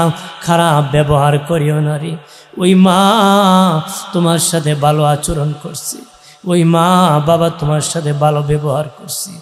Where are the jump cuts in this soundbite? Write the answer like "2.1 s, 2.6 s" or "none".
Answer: none

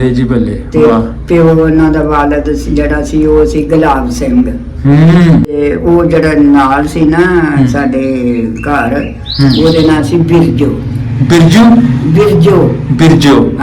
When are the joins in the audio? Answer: 5.6 s

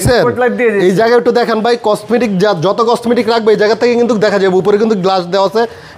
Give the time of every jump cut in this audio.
none

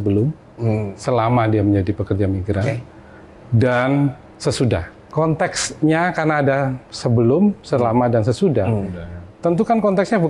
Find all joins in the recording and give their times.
5.0 s

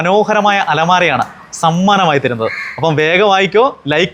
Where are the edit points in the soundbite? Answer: none

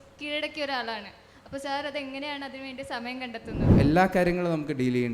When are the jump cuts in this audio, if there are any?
3.8 s

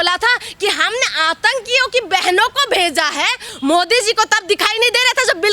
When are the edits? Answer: 3.5 s

